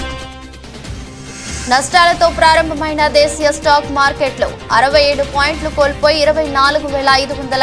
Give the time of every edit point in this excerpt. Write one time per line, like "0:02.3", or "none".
0:01.5